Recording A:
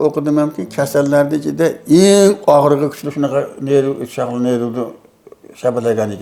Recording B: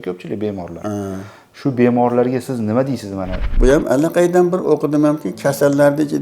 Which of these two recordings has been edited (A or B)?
B